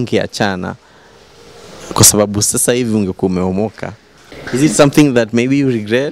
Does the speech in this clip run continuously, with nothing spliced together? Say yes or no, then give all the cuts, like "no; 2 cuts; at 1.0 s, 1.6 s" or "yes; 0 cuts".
no; 1 cut; at 4.3 s